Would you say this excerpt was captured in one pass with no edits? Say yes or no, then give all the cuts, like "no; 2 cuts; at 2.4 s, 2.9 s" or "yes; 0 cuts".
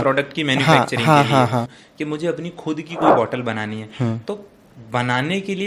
no; 1 cut; at 1.7 s